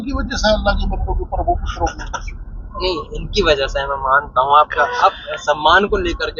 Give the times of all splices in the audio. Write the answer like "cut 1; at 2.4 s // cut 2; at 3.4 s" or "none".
none

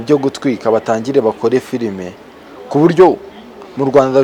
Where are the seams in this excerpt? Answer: none

